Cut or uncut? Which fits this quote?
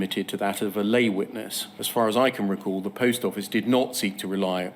cut